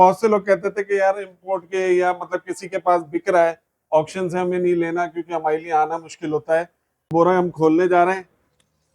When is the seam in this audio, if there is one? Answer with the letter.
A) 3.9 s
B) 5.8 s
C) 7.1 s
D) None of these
C